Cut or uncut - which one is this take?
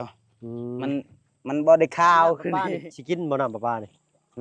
cut